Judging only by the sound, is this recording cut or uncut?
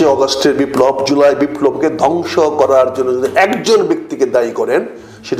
uncut